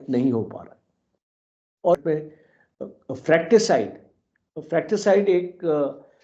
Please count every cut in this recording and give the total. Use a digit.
1